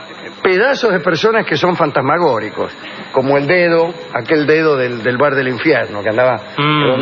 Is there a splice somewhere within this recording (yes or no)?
yes